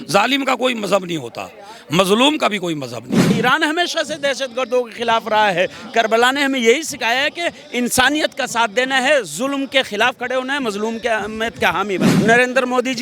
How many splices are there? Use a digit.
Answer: 2